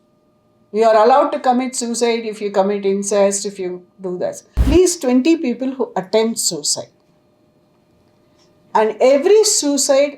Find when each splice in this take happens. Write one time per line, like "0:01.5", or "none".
0:04.6

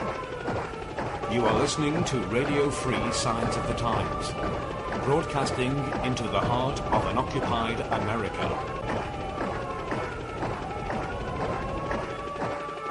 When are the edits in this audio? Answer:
0:07.9

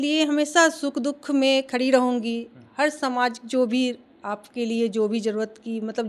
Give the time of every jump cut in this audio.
none

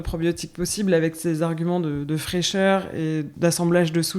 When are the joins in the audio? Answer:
0:03.3

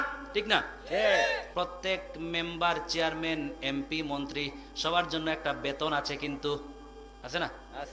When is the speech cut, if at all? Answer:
0:01.4

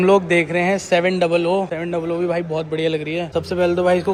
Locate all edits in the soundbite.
none

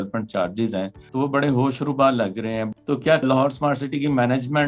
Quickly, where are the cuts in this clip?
0:01.0
0:03.2

